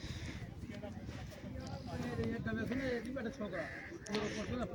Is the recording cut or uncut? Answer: uncut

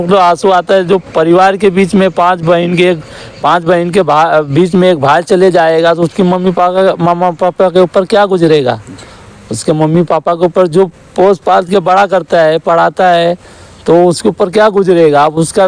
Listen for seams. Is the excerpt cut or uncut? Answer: uncut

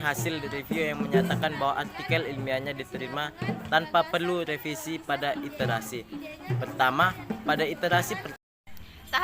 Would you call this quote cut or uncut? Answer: cut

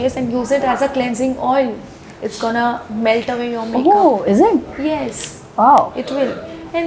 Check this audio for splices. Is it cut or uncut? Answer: uncut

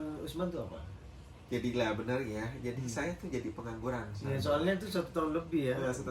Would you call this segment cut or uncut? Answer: uncut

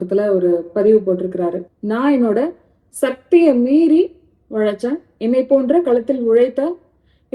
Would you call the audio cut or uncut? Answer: cut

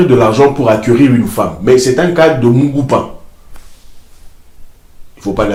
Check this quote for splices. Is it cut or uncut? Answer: uncut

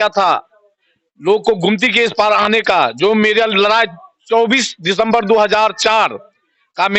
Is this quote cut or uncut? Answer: uncut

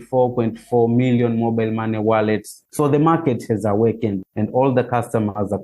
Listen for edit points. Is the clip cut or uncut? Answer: cut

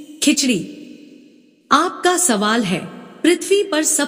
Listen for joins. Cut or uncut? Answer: uncut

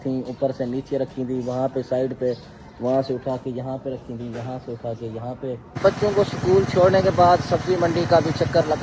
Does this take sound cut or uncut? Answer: cut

